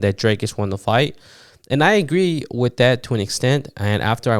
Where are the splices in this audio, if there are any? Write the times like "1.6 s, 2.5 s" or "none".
none